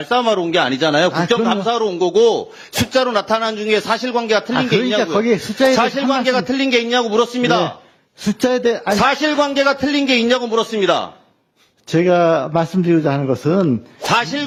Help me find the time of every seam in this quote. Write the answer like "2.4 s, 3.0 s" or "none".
none